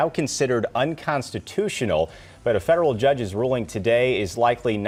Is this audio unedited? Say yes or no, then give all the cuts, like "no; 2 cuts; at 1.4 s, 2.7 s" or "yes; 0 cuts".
yes; 0 cuts